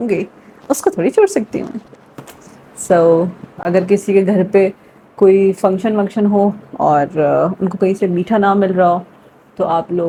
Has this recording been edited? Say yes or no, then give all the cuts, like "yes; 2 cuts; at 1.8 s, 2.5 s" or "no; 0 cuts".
no; 0 cuts